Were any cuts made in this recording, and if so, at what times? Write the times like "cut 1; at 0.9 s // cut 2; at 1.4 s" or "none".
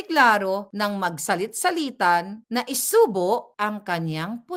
none